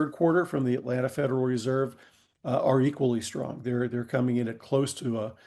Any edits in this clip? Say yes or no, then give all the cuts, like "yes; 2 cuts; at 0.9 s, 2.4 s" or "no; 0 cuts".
no; 0 cuts